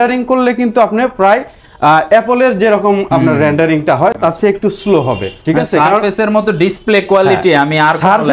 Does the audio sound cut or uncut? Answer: uncut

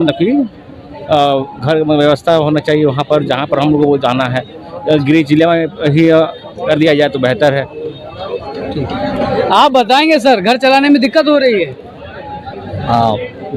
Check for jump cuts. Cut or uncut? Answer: uncut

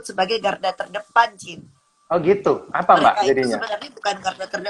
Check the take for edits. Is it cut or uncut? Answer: uncut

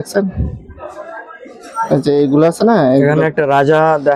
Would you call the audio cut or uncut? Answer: uncut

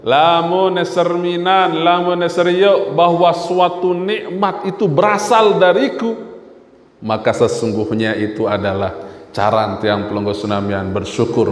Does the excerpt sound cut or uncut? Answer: uncut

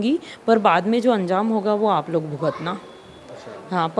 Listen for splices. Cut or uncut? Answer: uncut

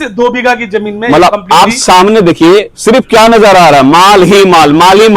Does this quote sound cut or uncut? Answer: uncut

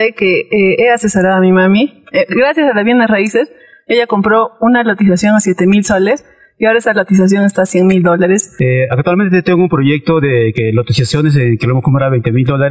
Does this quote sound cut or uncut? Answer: cut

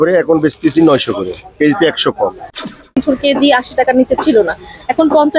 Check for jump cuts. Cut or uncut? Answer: cut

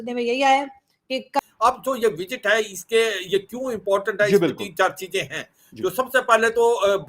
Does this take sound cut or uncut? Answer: cut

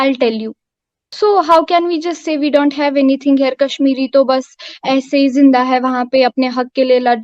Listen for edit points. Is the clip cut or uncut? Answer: uncut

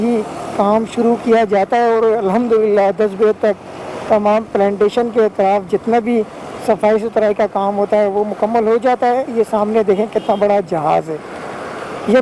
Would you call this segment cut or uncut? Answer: uncut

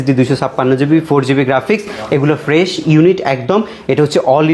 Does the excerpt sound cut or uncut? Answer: uncut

